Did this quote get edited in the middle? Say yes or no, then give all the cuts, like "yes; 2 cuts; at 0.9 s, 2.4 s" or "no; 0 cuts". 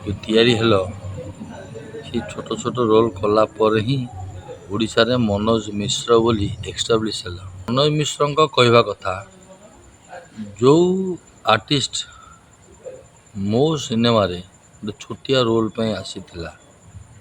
yes; 1 cut; at 7.7 s